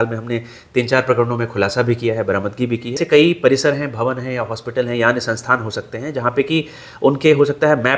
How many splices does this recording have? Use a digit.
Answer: 1